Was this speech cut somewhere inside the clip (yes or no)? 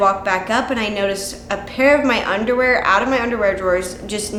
no